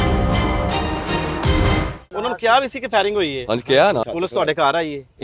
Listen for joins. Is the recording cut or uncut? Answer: cut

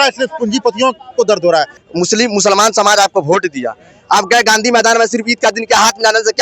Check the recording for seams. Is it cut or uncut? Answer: cut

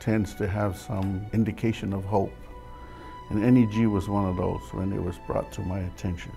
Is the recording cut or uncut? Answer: cut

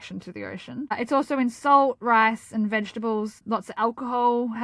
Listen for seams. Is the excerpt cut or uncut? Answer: cut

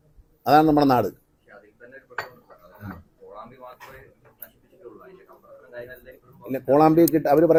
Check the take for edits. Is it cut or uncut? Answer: uncut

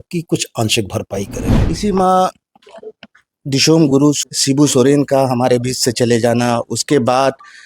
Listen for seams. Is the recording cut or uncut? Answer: cut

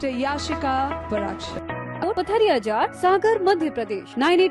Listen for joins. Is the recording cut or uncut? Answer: cut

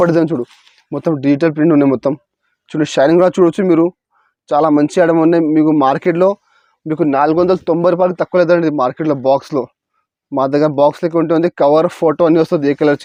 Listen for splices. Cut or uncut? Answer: uncut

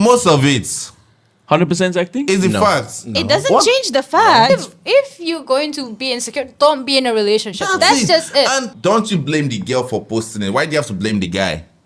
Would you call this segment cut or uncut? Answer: cut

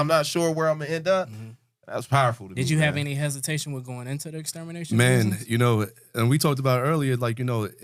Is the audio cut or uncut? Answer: uncut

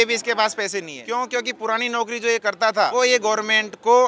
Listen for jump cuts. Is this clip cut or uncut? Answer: cut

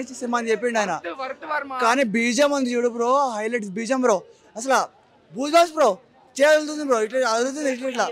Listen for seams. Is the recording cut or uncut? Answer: uncut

